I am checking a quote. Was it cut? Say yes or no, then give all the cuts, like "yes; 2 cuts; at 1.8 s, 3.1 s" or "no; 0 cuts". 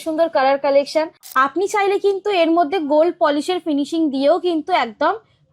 yes; 1 cut; at 1.2 s